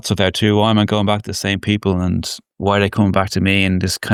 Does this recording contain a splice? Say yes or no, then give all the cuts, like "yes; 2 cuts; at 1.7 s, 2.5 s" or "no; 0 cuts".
no; 0 cuts